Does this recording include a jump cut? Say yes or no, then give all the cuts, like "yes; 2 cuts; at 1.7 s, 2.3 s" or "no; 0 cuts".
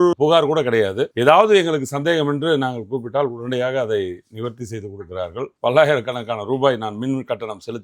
yes; 1 cut; at 5.6 s